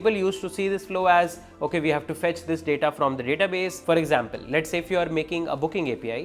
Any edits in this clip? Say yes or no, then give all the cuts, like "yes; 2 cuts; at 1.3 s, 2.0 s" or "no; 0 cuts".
yes; 1 cut; at 3.7 s